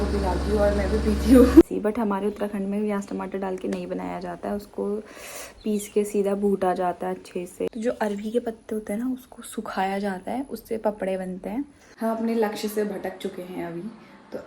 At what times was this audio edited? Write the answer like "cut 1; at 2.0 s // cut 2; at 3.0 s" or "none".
cut 1; at 1.6 s // cut 2; at 7.7 s // cut 3; at 11.8 s